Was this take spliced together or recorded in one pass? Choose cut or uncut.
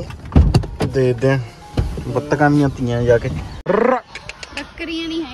cut